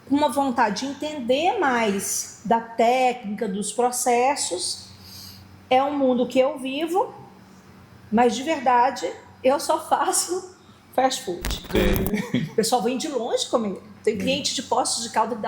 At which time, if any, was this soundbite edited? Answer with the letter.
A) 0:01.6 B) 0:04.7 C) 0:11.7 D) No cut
C